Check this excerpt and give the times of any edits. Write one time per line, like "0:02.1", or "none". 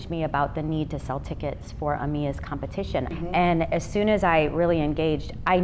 0:03.1